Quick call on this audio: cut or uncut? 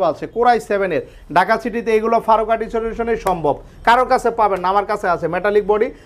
uncut